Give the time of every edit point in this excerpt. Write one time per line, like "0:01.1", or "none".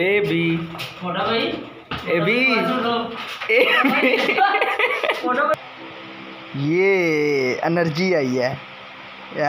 0:05.6